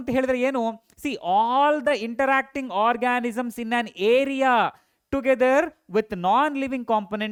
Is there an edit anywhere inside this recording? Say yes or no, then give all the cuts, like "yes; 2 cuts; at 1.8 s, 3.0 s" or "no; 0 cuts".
no; 0 cuts